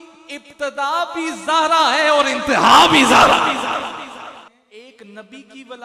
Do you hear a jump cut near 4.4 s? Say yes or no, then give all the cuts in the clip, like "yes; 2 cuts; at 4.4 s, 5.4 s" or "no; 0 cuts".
yes; 1 cut; at 4.4 s